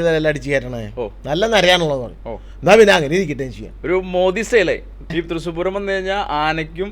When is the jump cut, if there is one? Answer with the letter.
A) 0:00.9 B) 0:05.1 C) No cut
B